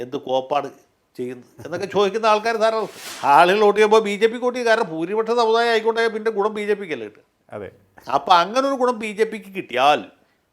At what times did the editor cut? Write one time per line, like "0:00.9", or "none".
0:03.0